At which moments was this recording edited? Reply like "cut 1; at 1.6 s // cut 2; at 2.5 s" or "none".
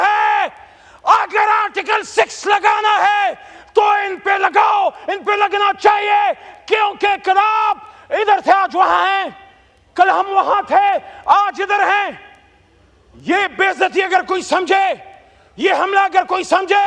none